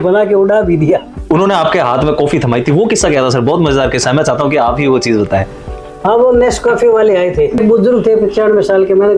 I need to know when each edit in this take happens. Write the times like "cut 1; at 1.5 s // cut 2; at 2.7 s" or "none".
cut 1; at 1.1 s // cut 2; at 7.6 s